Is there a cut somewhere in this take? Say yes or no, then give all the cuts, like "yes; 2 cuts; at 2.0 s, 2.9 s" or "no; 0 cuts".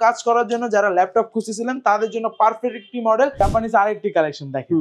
yes; 1 cut; at 3.4 s